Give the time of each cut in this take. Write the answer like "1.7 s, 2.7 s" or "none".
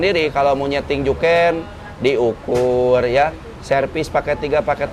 none